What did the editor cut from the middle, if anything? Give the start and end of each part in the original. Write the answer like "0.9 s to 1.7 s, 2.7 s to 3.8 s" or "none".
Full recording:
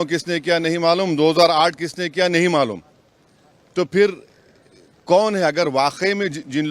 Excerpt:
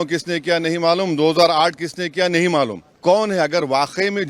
2.9 s to 4.9 s